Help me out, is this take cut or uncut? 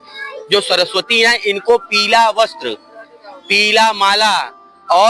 uncut